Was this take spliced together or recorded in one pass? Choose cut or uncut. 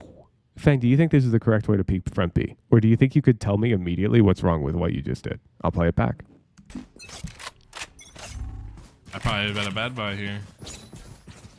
uncut